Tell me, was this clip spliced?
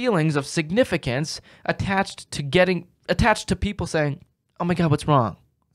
no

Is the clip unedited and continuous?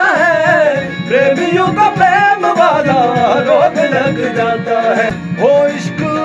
no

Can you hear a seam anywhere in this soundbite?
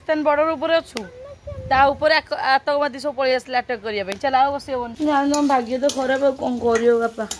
yes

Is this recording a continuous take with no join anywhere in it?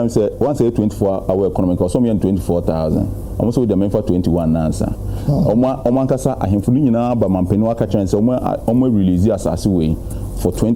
yes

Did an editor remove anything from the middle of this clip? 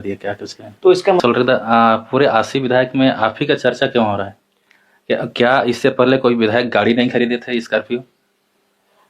yes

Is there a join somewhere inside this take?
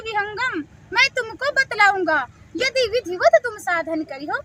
no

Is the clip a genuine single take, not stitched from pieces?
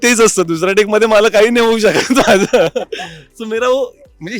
yes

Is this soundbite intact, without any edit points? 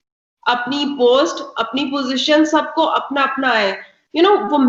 yes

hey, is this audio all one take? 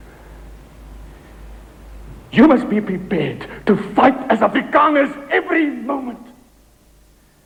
yes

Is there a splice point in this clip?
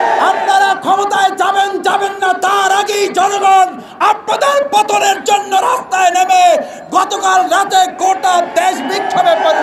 no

